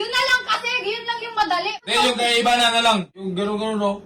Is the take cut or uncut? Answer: cut